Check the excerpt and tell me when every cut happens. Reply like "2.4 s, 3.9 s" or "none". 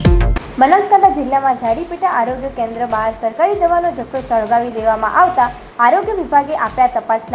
none